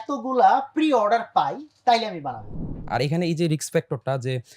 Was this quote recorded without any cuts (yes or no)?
no